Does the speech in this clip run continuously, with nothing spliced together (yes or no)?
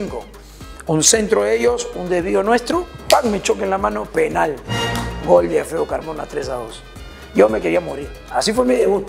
yes